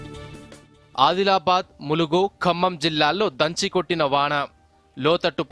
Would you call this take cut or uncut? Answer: cut